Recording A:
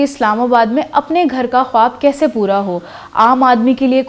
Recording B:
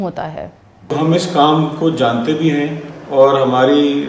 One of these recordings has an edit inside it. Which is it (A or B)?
B